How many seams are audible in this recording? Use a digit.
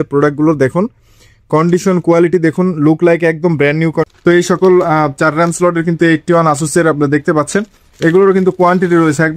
1